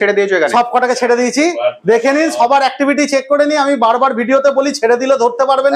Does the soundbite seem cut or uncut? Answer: uncut